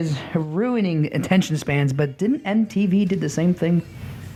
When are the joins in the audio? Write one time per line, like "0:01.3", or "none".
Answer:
none